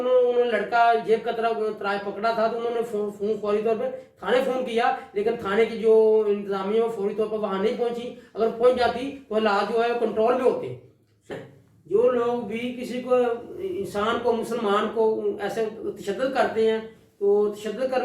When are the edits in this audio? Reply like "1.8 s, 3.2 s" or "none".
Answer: 11.3 s